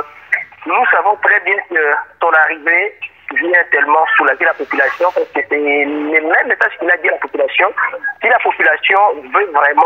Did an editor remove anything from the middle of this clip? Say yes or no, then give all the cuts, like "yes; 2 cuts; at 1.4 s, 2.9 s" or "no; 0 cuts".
no; 0 cuts